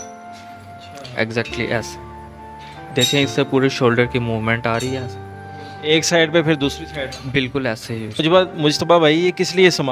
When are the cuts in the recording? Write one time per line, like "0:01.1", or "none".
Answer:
0:08.1